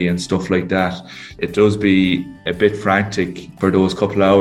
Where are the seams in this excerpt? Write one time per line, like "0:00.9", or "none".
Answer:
0:01.4
0:02.5
0:03.5